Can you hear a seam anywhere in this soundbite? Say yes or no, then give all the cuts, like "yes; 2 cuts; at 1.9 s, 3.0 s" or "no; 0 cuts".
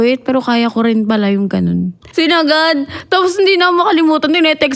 yes; 1 cut; at 2.0 s